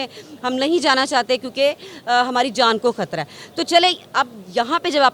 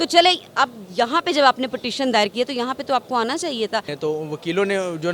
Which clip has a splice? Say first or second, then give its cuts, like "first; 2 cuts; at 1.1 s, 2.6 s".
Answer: second; 1 cut; at 3.9 s